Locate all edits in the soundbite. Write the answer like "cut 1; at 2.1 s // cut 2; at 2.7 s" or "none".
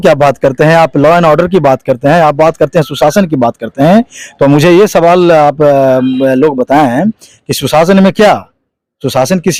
none

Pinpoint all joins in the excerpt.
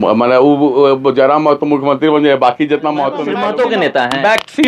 cut 1; at 3.3 s

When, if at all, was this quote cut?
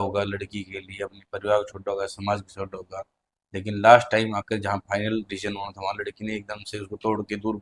none

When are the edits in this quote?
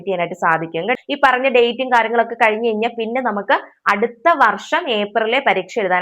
cut 1; at 1.0 s

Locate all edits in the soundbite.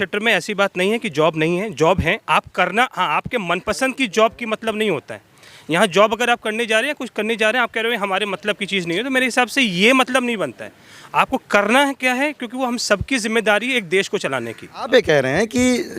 cut 1; at 14.9 s

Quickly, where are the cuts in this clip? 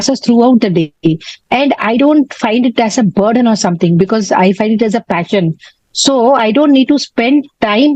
none

